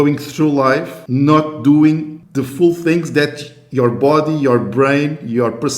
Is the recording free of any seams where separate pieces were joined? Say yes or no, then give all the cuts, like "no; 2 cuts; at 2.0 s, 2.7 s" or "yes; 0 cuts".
no; 2 cuts; at 1.0 s, 2.2 s